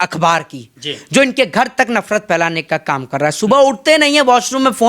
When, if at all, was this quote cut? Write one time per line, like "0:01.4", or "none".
none